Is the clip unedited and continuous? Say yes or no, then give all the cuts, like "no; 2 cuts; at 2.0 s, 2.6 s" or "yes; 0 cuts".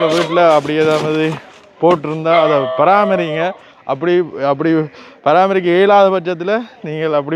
yes; 0 cuts